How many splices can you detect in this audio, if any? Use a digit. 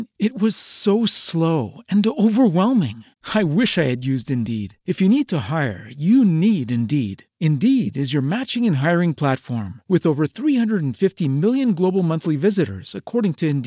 0